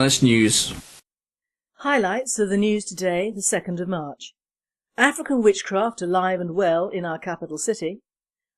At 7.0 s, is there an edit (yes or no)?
no